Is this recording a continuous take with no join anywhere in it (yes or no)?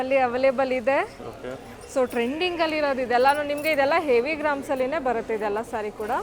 yes